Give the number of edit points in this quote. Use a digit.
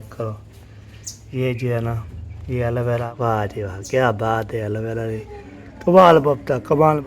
1